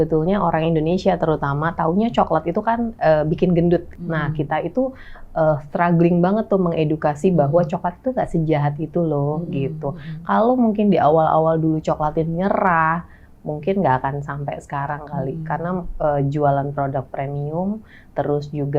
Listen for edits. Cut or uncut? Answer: cut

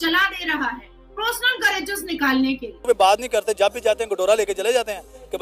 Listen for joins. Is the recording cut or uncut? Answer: cut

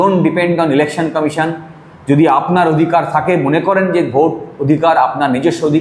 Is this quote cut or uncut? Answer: uncut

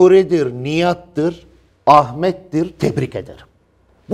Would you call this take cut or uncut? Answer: uncut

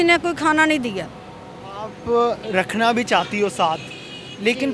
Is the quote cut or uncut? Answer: uncut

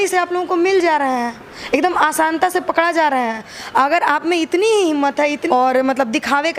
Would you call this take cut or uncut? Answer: cut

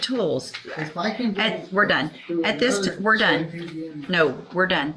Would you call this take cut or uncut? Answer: uncut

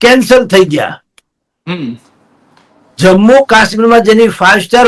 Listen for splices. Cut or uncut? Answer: uncut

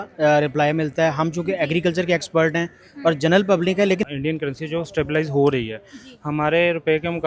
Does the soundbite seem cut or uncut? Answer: cut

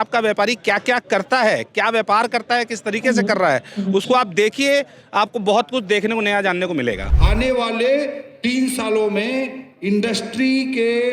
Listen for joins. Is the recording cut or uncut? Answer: cut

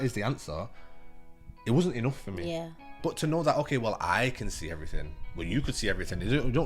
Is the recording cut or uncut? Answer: cut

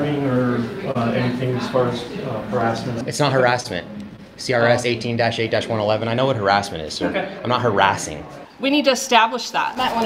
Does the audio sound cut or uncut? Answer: cut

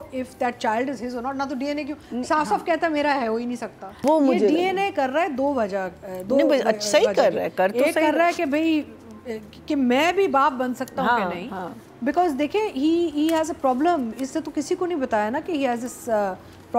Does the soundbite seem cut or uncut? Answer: cut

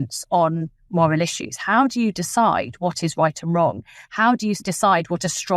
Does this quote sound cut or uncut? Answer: cut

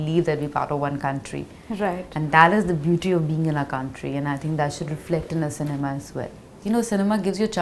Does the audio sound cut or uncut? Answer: cut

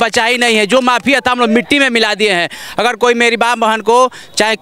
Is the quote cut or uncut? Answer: uncut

